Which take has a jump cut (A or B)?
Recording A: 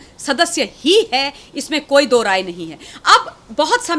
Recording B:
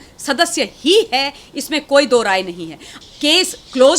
B